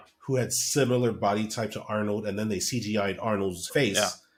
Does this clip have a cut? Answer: no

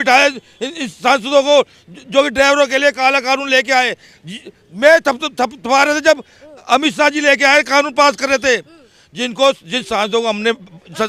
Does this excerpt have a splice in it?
no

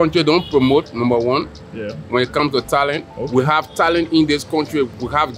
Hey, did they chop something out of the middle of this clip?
no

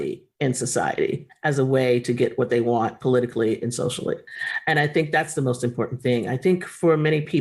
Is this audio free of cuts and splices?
yes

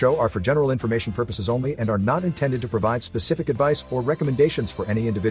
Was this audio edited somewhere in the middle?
no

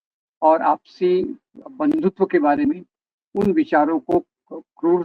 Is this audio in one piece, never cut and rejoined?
yes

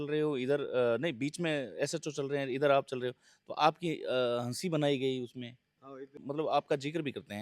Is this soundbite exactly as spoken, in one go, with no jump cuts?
no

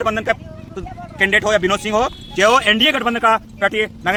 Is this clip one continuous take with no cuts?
yes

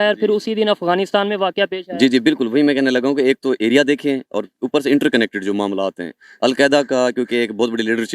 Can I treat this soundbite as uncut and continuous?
yes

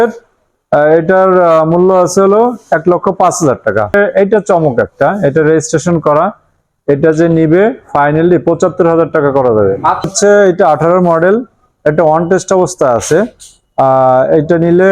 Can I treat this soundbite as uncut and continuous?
no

